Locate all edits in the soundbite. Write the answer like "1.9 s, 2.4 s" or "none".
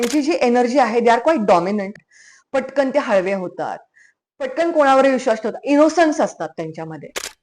2.0 s